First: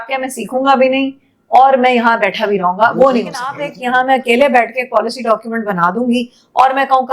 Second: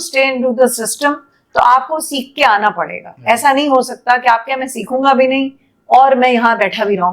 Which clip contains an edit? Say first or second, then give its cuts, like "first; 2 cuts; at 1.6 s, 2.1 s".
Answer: first; 1 cut; at 3.7 s